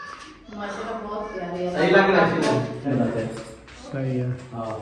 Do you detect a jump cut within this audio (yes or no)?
yes